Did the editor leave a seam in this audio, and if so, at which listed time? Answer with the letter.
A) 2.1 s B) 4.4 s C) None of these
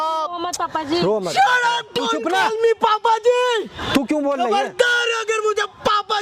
C